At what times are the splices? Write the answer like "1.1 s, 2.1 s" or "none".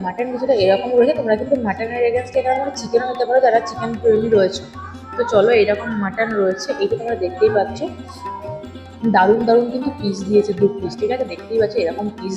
none